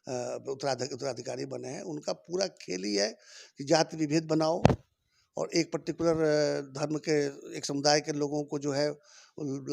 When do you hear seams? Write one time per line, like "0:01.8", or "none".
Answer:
none